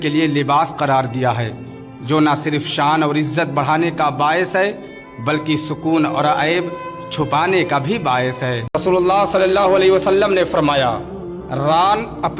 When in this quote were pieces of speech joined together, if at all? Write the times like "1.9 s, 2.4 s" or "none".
none